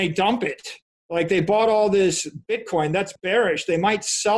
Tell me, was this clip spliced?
yes; 1 cut; at 3.2 s

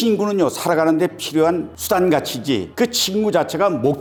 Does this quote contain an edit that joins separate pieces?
no; 0 cuts

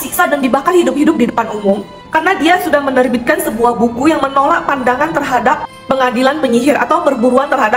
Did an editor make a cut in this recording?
no; 0 cuts

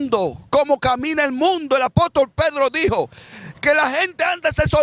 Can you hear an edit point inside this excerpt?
no; 0 cuts

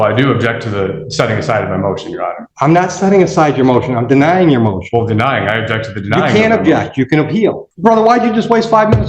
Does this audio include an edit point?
yes; 2 cuts; at 2.4 s, 7.7 s

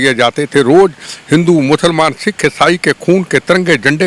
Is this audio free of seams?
yes; 0 cuts

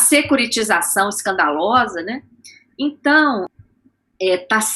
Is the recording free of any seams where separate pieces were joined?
no; 1 cut; at 3.5 s

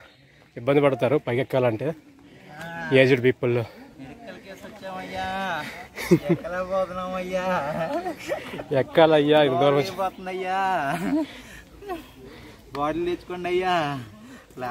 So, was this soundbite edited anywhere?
no; 0 cuts

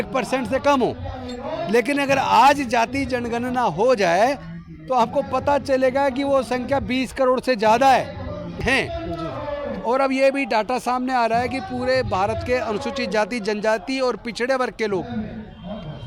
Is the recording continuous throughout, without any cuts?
no; 1 cut; at 8.6 s

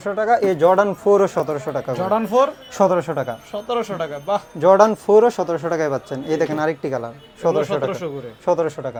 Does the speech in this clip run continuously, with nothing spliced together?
yes; 0 cuts

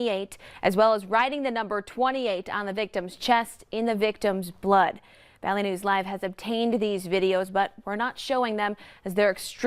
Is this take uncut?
yes; 0 cuts

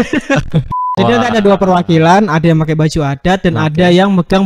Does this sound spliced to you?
yes; 1 cut; at 1.0 s

